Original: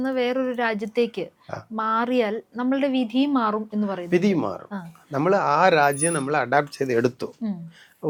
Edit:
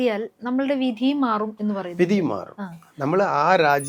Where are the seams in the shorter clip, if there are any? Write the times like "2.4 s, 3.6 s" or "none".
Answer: none